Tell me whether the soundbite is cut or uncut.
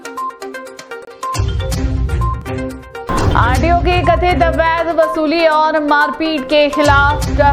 cut